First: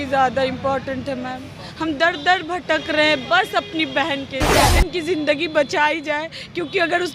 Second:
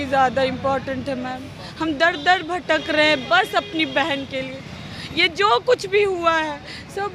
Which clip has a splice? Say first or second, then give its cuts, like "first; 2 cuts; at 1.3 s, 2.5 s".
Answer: first; 1 cut; at 4.6 s